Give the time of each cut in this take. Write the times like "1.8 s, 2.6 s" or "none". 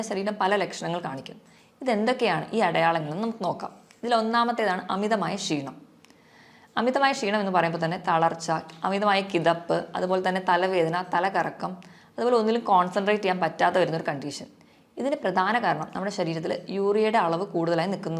none